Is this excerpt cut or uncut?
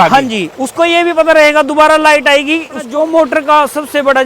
cut